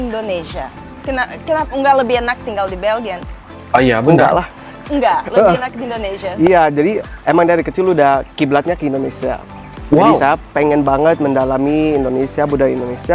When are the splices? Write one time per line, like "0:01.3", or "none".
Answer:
none